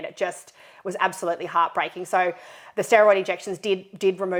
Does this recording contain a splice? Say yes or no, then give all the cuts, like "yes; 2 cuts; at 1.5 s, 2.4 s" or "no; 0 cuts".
no; 0 cuts